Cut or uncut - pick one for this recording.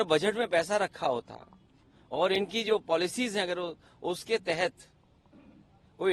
uncut